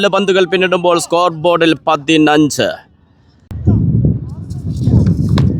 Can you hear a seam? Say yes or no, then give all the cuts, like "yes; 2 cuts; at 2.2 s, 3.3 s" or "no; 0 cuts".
yes; 1 cut; at 3.5 s